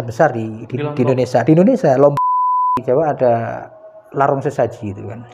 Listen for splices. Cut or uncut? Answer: cut